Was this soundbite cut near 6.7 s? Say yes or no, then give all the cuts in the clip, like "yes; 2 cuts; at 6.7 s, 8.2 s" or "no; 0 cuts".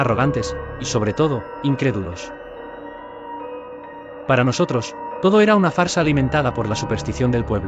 no; 2 cuts; at 2.1 s, 3.8 s